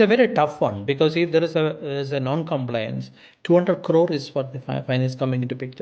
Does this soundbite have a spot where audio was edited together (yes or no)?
no